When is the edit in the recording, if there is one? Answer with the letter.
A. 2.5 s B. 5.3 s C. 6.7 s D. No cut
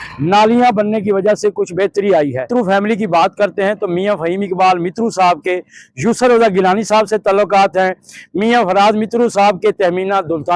A